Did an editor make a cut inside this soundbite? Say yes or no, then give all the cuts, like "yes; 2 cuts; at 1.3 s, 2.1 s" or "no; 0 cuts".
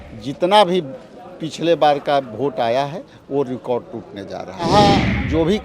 yes; 1 cut; at 4.7 s